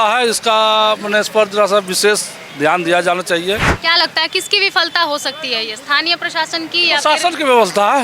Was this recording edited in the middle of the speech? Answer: yes; 1 cut; at 3.7 s

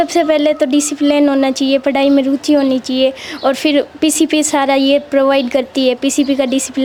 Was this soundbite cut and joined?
no; 0 cuts

